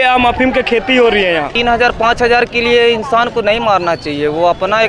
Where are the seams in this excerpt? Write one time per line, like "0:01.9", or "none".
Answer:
0:01.5